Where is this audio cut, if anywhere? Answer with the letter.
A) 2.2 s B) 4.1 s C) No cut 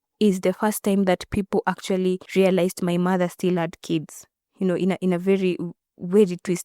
A